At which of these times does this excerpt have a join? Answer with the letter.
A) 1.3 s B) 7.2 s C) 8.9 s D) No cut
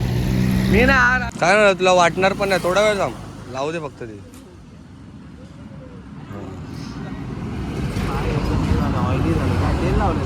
A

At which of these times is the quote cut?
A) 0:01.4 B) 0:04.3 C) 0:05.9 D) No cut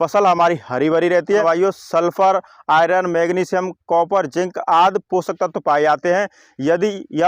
A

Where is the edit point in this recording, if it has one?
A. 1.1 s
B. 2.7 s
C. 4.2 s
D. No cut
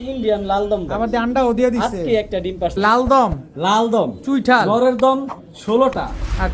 B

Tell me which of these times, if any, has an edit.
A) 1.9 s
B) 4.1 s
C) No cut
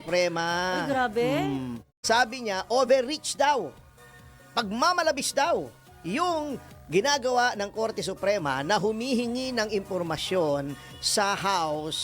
A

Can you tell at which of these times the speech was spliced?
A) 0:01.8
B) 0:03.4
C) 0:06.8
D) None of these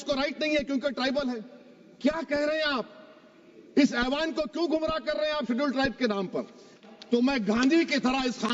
C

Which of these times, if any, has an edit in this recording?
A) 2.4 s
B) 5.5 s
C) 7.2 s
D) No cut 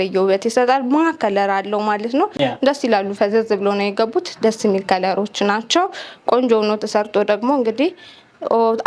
D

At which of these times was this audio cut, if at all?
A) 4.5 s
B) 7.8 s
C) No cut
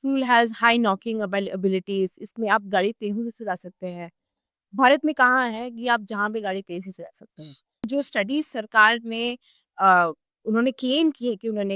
B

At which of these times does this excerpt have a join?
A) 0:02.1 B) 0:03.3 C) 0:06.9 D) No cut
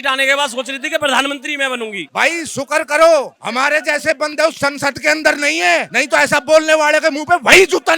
A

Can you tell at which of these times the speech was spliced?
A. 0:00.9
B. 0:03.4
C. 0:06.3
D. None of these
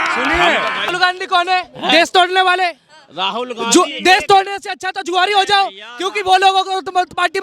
A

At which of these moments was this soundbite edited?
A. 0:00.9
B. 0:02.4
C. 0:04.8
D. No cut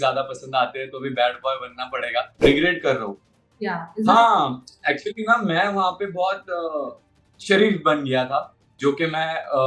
B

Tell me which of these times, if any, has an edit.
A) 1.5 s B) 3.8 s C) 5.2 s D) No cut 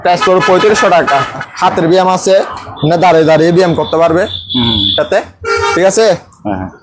A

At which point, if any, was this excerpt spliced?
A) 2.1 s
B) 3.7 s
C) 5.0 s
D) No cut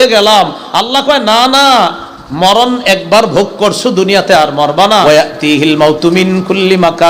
C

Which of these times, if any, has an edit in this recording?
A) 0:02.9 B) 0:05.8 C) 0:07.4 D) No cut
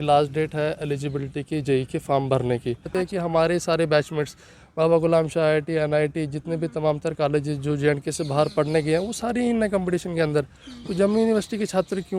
A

